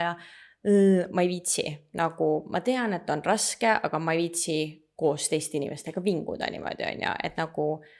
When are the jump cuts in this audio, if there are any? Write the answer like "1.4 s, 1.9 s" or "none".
none

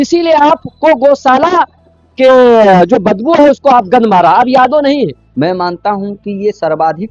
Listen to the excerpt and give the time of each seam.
5.2 s

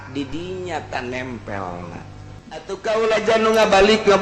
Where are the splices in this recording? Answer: 2.7 s

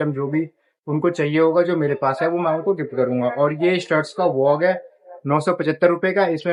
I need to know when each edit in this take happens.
none

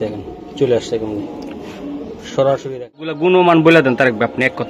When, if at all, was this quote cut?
3.1 s

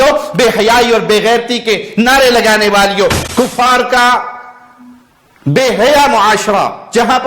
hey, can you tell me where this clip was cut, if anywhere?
3.2 s

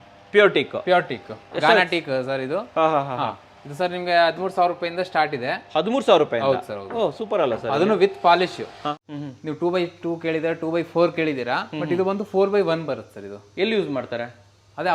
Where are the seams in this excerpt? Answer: 8.9 s

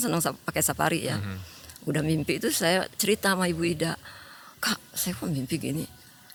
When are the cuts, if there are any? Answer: none

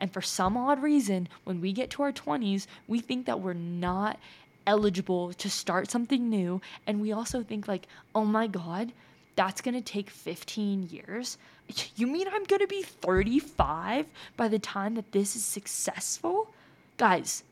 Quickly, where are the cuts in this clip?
none

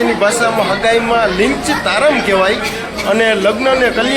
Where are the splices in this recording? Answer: none

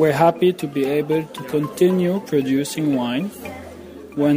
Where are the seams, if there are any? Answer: none

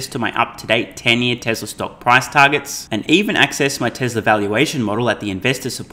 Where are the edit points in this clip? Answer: none

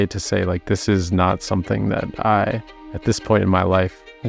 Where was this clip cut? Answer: none

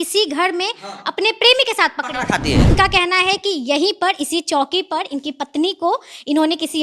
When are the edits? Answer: 2.7 s

